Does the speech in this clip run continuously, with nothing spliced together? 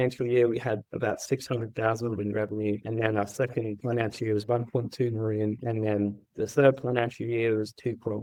yes; 0 cuts

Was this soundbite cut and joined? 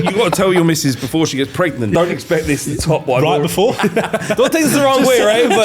yes; 2 cuts; at 1.9 s, 3.9 s

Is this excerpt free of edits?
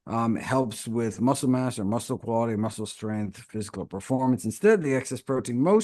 yes; 0 cuts

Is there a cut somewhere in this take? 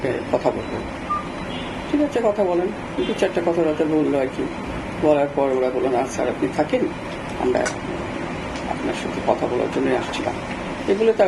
no; 0 cuts

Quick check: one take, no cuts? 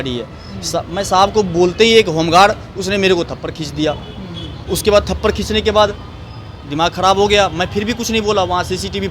yes; 0 cuts

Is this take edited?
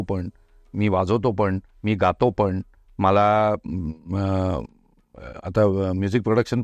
no; 0 cuts

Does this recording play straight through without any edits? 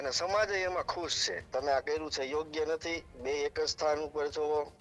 no; 1 cut; at 1.3 s

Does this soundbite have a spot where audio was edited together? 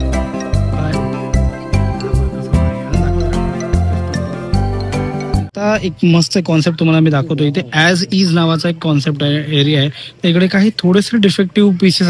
yes; 1 cut; at 5.6 s

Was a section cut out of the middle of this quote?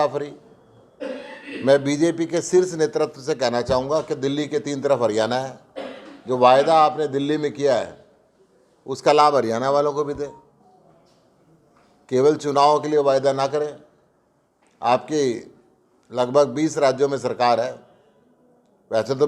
no; 0 cuts

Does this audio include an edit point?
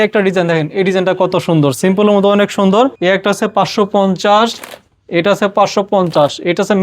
yes; 1 cut; at 3.0 s

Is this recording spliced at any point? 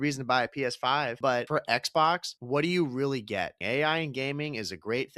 yes; 3 cuts; at 1.3 s, 2.3 s, 3.6 s

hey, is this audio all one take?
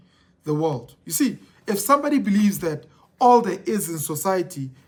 yes; 0 cuts

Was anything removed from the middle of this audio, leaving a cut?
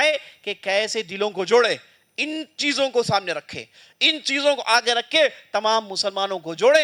no; 0 cuts

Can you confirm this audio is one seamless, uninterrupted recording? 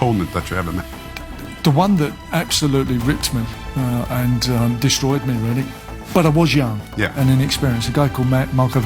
yes; 0 cuts

